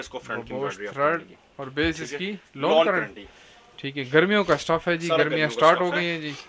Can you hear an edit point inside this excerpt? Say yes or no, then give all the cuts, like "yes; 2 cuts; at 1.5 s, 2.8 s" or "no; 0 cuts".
no; 0 cuts